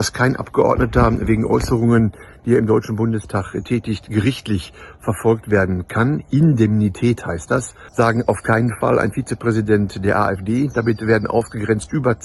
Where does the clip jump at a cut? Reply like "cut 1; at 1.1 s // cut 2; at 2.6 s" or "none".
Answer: cut 1; at 7.8 s